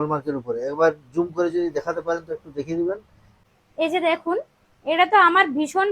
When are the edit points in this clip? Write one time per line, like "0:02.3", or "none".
0:03.4